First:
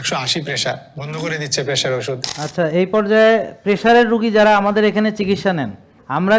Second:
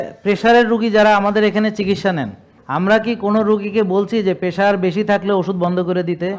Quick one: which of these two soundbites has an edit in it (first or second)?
first